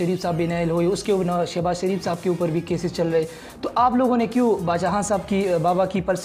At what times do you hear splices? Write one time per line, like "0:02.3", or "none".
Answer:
none